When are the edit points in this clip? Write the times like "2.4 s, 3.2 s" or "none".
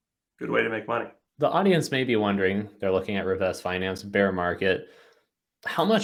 none